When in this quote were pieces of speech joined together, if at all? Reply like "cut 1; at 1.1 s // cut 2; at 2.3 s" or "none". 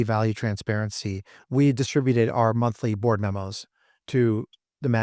cut 1; at 1.3 s